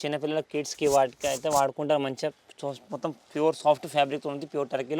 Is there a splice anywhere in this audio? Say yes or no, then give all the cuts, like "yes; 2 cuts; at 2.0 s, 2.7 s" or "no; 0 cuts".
no; 0 cuts